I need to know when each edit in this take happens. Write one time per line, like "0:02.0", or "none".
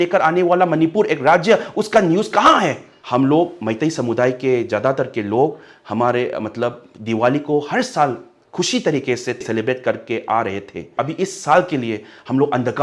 0:02.9
0:09.4
0:10.9